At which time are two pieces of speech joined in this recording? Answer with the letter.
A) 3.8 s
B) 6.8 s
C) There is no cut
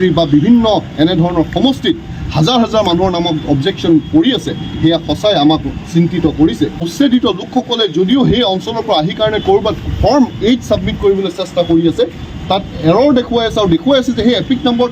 B